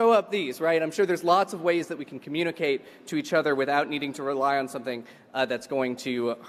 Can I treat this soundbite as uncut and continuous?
yes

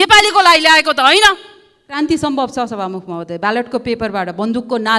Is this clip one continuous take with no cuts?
no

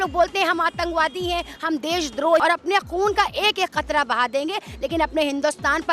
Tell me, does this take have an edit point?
yes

